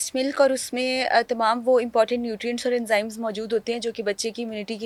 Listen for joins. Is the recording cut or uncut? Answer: uncut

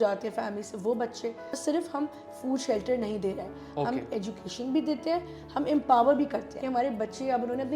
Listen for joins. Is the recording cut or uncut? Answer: cut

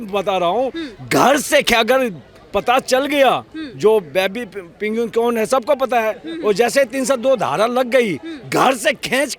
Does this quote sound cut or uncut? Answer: uncut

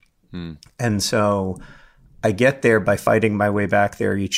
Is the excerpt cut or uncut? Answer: cut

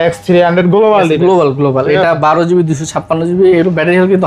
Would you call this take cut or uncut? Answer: uncut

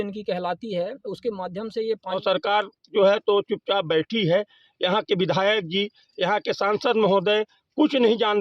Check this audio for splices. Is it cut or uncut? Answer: cut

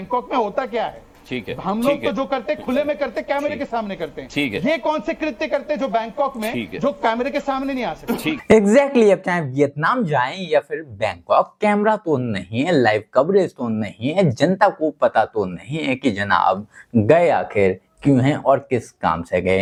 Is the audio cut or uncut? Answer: uncut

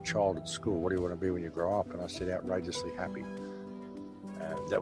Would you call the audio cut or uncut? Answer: uncut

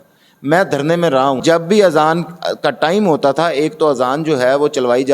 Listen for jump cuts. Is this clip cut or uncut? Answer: cut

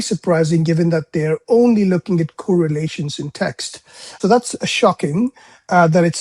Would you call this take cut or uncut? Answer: cut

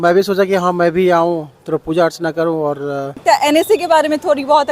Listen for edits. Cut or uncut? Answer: cut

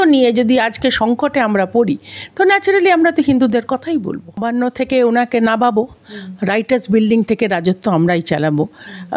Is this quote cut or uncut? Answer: cut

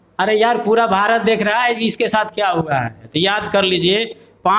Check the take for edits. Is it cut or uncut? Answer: cut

